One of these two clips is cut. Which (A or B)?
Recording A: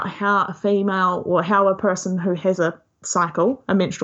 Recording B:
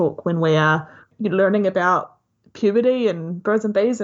B